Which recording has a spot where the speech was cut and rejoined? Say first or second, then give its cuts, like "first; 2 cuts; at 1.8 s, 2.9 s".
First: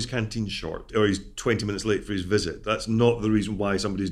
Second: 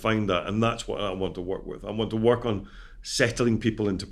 first; 1 cut; at 0.9 s